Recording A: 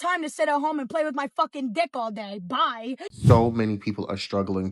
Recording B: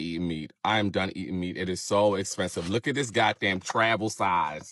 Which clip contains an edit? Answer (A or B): A